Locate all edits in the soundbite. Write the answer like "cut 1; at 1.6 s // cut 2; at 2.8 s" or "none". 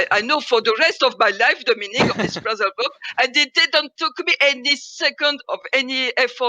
cut 1; at 5.4 s